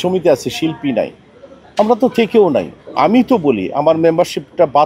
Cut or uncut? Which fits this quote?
uncut